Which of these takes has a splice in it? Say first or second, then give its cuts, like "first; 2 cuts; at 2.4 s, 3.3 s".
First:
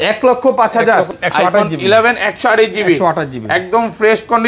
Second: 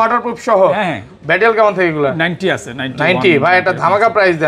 first; 1 cut; at 1.1 s